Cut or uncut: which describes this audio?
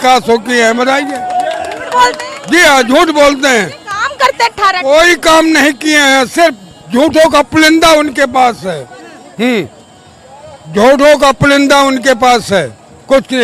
uncut